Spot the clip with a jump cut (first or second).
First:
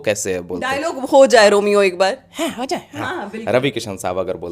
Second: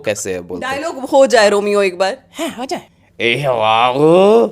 second